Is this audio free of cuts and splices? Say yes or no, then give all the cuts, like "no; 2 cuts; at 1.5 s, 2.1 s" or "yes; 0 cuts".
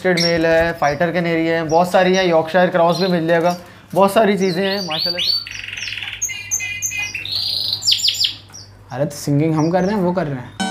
no; 1 cut; at 5.0 s